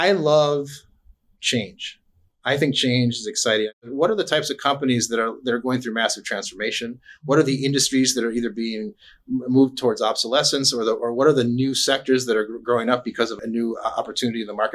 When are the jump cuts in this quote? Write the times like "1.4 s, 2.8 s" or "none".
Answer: 3.7 s, 13.3 s